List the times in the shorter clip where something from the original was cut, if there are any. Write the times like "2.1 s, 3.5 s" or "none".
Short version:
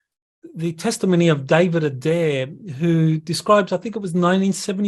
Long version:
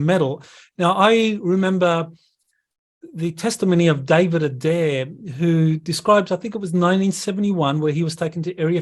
none